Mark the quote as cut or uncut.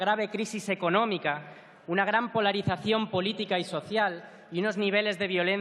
cut